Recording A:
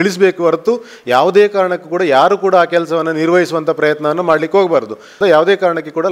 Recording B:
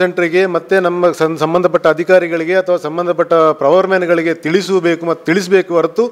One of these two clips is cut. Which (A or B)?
A